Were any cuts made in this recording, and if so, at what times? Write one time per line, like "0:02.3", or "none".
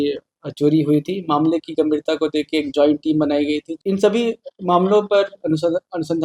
0:03.7